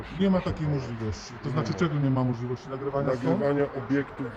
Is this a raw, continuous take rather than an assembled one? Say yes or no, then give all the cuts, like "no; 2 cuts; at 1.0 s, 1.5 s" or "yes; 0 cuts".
yes; 0 cuts